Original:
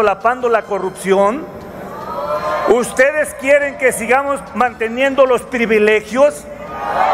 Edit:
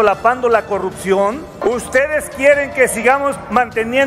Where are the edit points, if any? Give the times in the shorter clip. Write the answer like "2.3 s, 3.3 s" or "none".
1.6 s